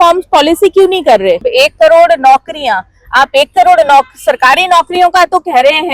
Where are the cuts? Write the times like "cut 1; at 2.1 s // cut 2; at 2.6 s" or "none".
cut 1; at 1.5 s